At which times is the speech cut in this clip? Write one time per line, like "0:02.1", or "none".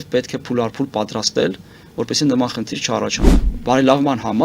0:03.4